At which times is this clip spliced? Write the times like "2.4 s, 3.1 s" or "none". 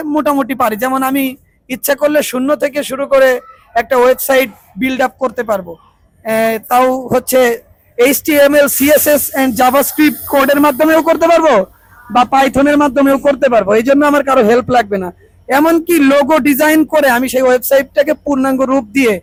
none

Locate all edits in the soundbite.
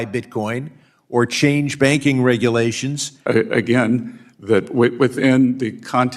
3.2 s

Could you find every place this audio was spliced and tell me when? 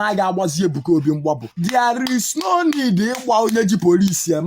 1.5 s

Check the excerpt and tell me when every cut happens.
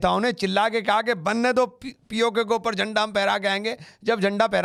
none

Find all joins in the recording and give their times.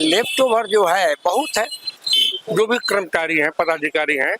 2.0 s

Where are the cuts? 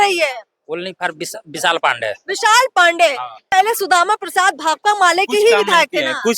3.3 s

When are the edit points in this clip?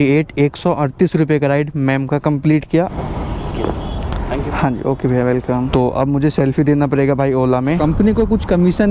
2.9 s, 5.7 s, 7.8 s

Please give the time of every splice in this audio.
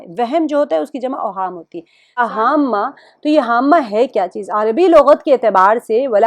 2.2 s

